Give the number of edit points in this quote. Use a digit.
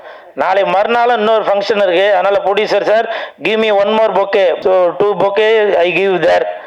1